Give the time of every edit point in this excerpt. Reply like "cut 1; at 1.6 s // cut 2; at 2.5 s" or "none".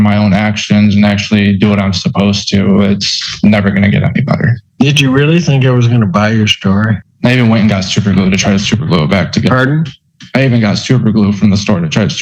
cut 1; at 4.6 s // cut 2; at 7.1 s